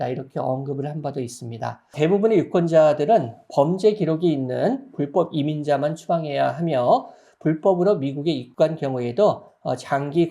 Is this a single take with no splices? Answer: no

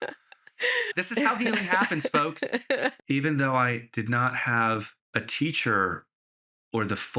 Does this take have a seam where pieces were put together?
yes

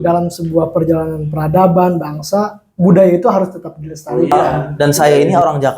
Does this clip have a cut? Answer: yes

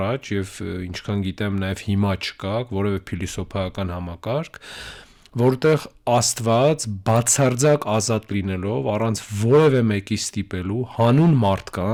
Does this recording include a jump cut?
no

